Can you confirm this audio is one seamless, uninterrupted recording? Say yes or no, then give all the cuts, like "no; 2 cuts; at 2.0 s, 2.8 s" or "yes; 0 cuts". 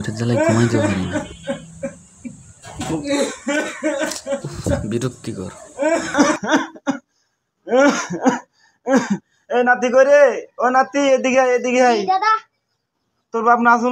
yes; 0 cuts